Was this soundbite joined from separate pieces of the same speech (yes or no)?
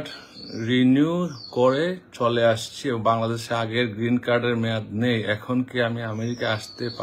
no